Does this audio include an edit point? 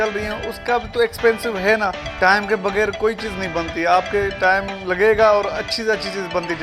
yes; 1 cut; at 2.0 s

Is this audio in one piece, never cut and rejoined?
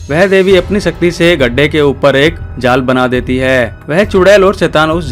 yes; 0 cuts

